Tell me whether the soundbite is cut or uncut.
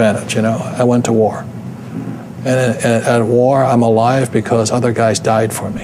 uncut